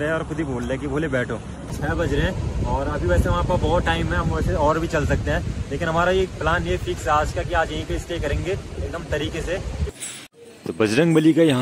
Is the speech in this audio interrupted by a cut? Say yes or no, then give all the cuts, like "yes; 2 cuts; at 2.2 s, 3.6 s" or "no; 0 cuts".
yes; 2 cuts; at 1.7 s, 10.0 s